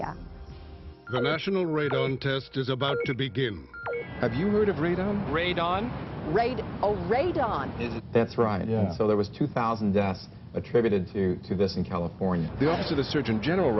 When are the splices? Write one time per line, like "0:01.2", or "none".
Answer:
none